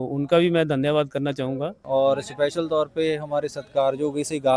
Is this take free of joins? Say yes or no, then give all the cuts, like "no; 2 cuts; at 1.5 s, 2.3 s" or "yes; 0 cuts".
no; 1 cut; at 1.8 s